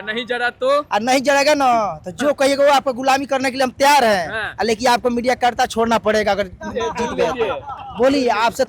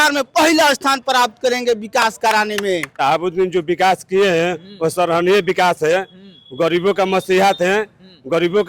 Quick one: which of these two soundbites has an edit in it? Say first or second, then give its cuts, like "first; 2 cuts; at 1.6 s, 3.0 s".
second; 1 cut; at 2.9 s